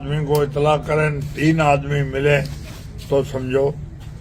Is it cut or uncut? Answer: uncut